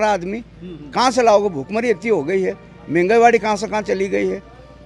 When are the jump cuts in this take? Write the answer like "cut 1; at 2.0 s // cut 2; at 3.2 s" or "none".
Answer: none